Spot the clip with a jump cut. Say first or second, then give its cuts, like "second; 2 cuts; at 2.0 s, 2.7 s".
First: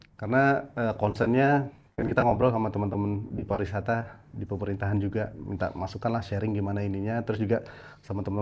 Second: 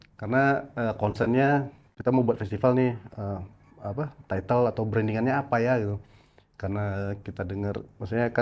second; 1 cut; at 1.9 s